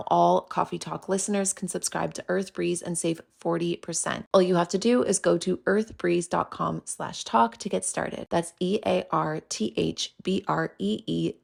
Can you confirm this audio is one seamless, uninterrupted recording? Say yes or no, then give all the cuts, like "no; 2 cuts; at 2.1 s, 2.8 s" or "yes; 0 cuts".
yes; 0 cuts